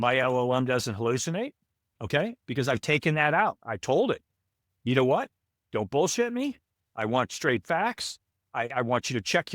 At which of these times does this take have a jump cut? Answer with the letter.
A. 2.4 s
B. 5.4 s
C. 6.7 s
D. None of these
A